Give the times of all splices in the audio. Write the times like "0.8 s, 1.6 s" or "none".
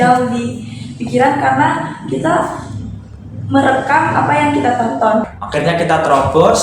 5.4 s

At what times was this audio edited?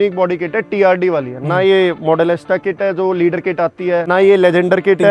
4.1 s

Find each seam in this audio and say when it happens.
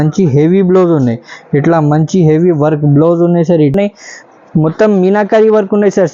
3.7 s

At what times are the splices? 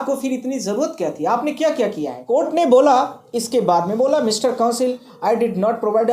2.1 s

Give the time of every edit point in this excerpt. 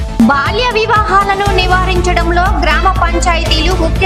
none

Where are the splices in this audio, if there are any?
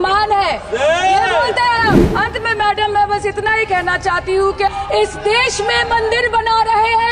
2.1 s, 4.7 s

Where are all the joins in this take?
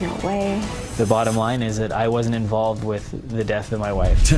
none

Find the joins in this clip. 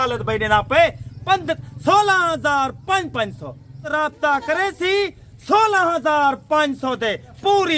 3.9 s

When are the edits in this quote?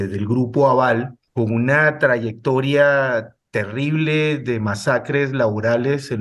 1.2 s

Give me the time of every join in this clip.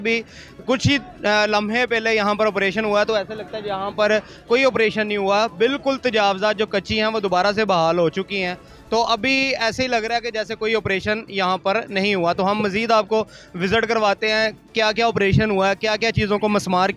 none

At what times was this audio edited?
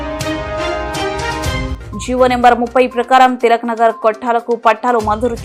1.8 s

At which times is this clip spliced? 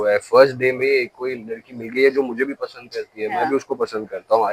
none

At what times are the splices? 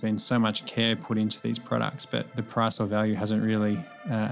2.4 s

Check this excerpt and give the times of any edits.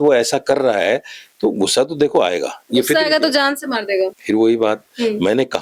none

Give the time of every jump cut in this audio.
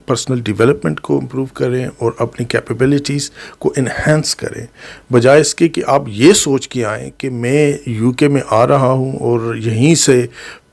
none

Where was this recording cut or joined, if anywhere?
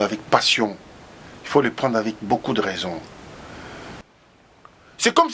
4.0 s

